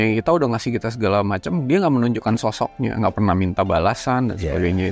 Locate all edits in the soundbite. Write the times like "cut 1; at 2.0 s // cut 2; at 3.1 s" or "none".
none